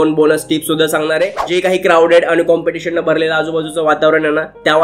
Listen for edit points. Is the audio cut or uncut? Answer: cut